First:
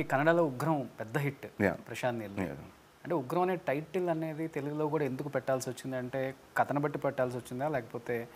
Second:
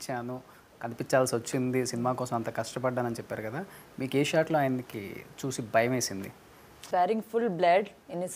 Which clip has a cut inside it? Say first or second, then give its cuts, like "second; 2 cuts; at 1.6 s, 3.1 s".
second; 1 cut; at 6.8 s